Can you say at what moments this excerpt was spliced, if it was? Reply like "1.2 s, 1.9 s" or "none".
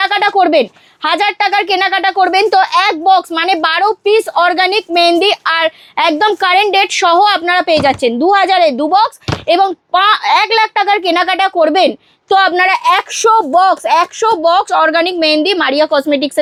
none